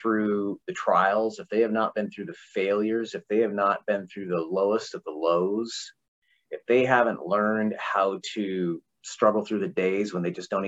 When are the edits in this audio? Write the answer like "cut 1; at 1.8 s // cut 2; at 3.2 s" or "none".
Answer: cut 1; at 9.0 s